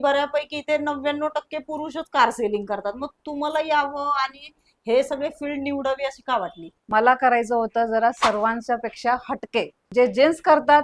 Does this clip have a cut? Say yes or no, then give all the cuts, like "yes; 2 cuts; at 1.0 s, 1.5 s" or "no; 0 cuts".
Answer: yes; 2 cuts; at 6.9 s, 9.8 s